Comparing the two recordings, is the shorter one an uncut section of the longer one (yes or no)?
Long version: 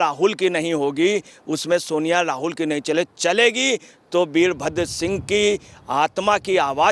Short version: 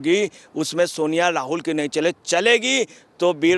yes